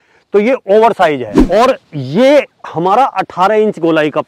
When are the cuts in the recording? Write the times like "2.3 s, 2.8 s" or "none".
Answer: 1.3 s